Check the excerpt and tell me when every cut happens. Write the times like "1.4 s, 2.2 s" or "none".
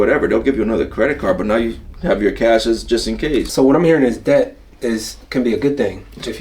3.5 s